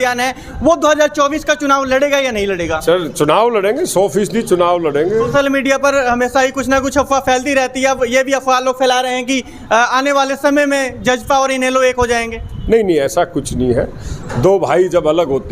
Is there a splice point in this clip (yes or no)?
yes